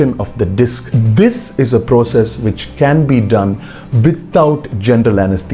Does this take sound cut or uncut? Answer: cut